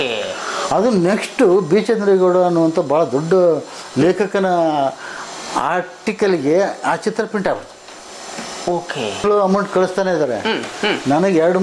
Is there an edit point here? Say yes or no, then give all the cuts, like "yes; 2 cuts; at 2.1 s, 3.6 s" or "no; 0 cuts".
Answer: yes; 1 cut; at 9.2 s